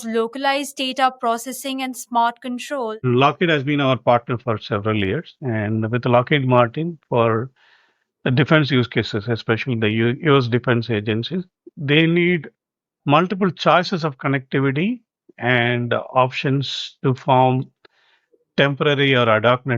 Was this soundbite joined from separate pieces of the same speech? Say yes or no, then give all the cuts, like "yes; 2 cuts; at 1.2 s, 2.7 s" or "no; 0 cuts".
no; 0 cuts